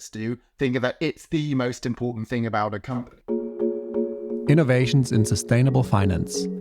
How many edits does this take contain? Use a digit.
1